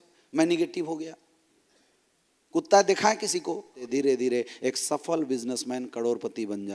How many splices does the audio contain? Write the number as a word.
one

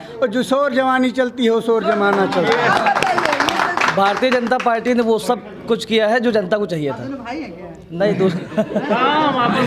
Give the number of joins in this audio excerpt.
zero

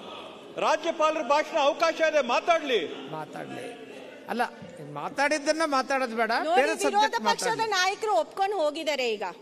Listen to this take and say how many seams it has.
zero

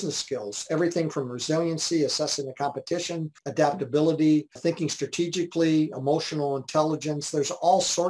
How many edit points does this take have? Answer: two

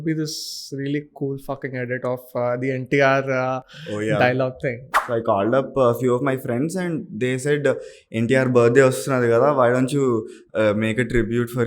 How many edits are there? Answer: one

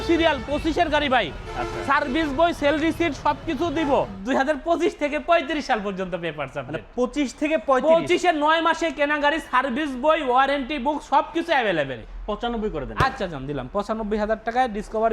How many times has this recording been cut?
two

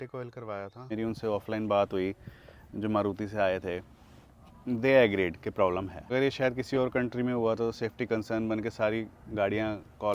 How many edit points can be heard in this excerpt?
two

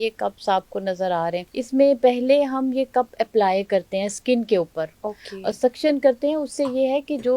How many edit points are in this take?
one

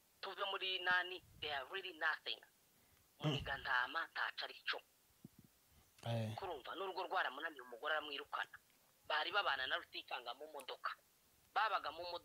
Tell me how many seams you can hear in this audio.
zero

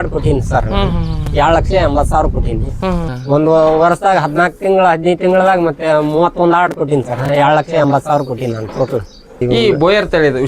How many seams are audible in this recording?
two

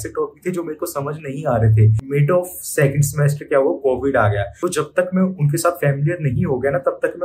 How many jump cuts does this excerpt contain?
two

